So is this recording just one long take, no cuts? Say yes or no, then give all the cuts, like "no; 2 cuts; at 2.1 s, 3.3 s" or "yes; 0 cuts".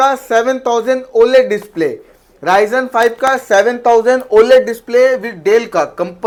yes; 0 cuts